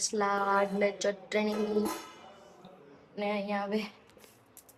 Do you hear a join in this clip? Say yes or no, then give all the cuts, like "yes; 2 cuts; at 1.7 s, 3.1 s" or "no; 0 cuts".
no; 0 cuts